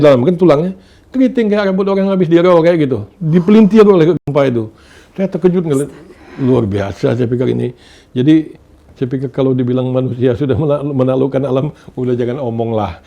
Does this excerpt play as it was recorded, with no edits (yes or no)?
yes